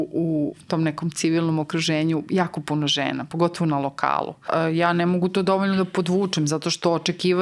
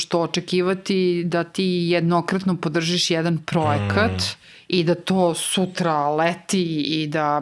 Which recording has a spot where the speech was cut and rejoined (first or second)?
first